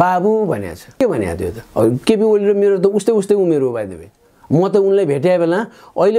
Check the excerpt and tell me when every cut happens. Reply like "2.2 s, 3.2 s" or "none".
none